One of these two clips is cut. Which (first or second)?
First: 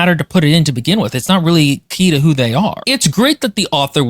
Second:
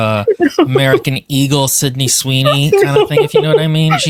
first